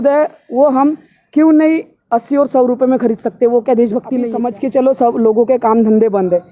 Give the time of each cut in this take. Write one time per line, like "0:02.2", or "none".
0:04.3